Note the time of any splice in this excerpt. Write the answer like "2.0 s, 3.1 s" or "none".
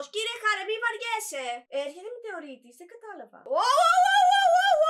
1.6 s, 3.4 s

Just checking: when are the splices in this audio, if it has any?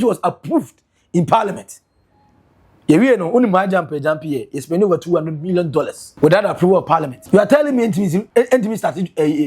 6.0 s, 7.1 s, 8.3 s

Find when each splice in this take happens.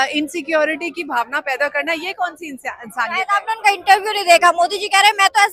none

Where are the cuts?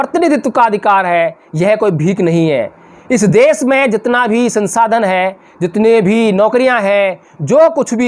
none

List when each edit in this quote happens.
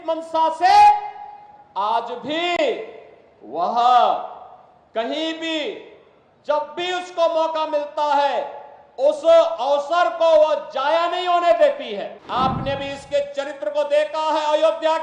12.2 s

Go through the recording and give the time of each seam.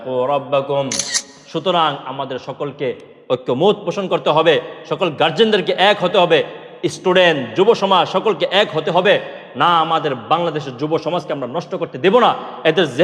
1.4 s

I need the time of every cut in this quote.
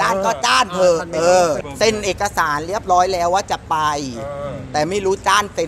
1.6 s

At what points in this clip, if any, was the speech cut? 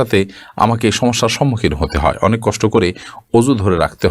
none

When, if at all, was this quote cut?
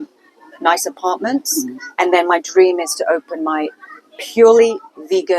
none

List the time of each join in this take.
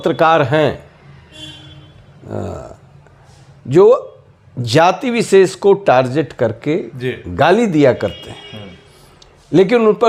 none

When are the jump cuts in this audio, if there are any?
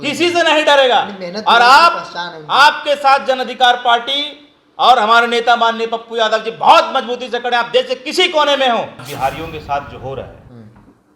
9.1 s

